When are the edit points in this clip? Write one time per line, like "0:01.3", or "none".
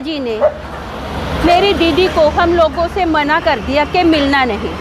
none